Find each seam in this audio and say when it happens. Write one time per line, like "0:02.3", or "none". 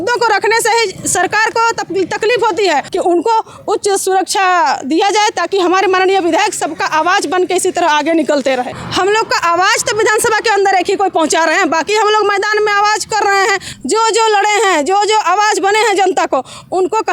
0:02.9
0:08.8
0:13.7